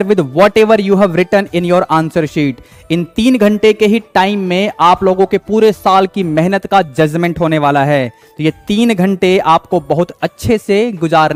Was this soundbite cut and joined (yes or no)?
no